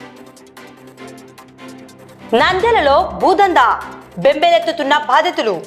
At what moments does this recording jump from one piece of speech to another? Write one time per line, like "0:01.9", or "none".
0:01.7